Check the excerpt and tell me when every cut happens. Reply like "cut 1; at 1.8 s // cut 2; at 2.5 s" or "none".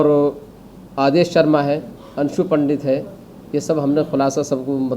none